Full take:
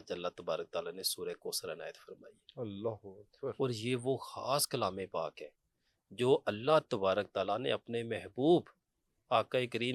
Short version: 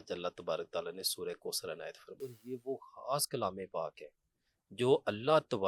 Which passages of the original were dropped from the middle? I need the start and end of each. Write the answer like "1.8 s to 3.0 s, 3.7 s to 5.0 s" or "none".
2.4 s to 3.8 s